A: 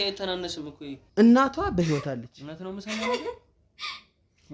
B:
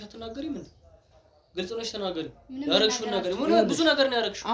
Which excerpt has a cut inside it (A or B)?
A